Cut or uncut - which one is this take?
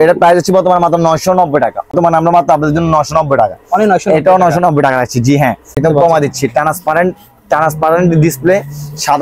cut